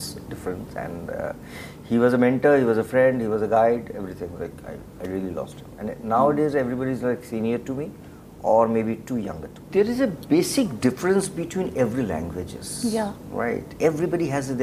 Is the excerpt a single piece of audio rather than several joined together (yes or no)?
no